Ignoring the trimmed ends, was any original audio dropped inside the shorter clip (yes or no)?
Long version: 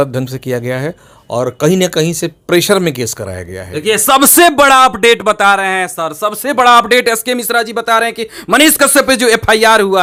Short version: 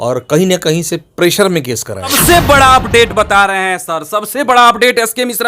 yes